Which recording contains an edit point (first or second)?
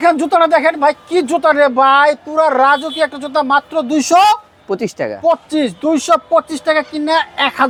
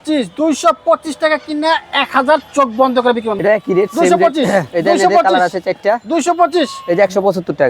second